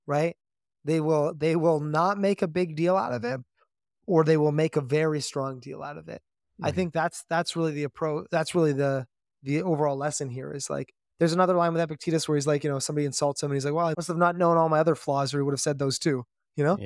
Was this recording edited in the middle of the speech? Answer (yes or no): yes